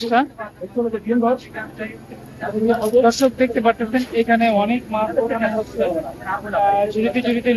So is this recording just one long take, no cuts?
yes; 0 cuts

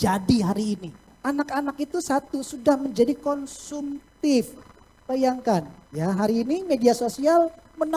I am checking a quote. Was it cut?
yes; 1 cut; at 1.1 s

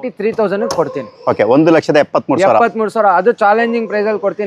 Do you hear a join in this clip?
no; 0 cuts

